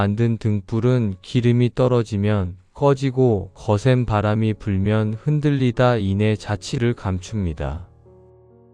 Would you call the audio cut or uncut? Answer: cut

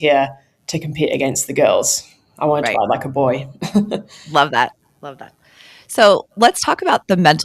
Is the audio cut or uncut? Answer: uncut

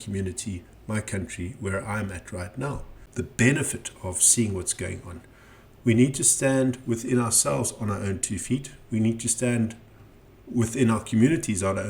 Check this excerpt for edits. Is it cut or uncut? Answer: cut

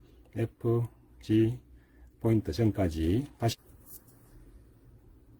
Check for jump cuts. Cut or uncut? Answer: cut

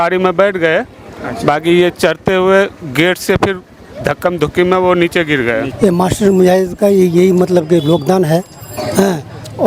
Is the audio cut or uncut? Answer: cut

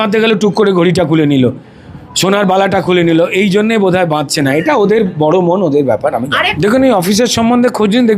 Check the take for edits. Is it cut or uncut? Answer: cut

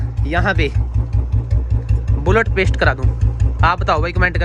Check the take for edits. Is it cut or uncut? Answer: uncut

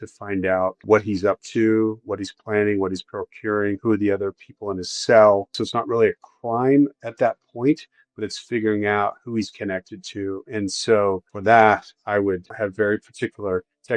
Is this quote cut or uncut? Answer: uncut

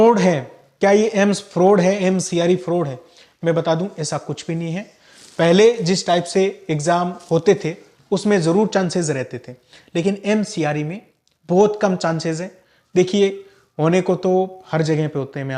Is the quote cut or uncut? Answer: uncut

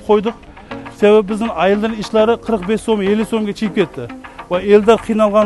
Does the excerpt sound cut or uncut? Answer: uncut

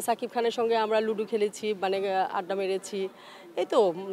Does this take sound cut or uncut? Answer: uncut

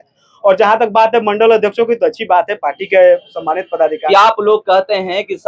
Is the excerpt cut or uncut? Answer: cut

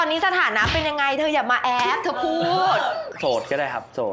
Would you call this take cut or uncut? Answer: cut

